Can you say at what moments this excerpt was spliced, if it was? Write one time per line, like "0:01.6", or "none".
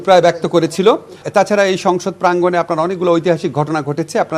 0:01.2